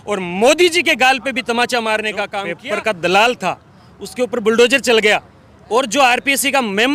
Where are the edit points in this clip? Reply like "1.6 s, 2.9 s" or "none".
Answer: 2.4 s